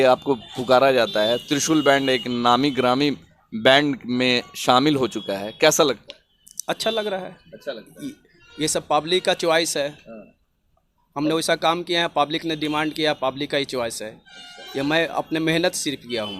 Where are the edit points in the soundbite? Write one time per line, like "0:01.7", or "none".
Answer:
none